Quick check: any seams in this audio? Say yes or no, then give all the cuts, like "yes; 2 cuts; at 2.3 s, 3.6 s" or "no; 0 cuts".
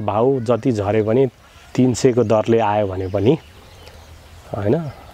no; 0 cuts